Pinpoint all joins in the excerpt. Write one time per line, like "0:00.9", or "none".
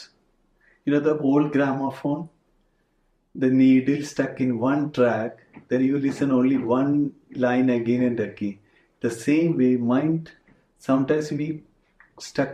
none